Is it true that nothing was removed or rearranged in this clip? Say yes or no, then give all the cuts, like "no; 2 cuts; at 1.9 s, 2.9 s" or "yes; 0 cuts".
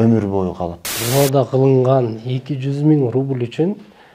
no; 1 cut; at 1.0 s